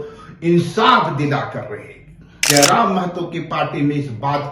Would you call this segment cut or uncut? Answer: cut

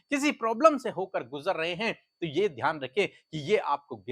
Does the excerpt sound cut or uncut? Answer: uncut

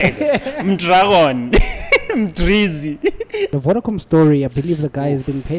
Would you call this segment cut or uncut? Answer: cut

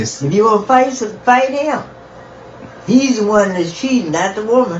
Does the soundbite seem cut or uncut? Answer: uncut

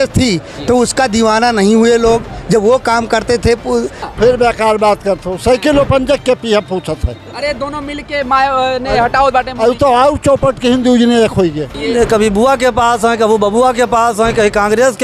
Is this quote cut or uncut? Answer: cut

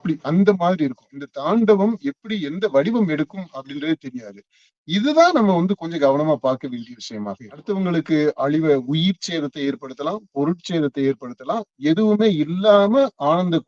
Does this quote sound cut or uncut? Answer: cut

